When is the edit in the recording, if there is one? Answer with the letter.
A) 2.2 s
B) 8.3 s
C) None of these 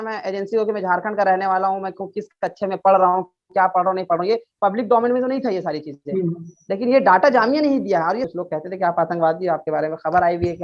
B